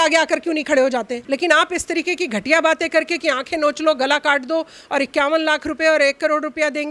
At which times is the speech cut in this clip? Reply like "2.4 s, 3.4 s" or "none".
1.2 s